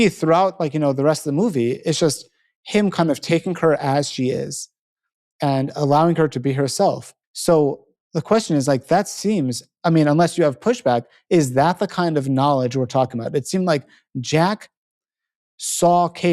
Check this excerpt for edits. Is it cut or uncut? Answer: uncut